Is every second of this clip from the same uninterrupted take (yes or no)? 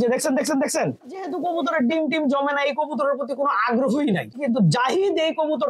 no